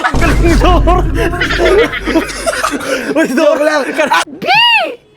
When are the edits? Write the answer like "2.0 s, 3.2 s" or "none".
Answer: 4.3 s